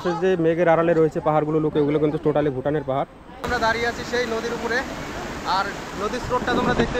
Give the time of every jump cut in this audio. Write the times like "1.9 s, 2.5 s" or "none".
3.5 s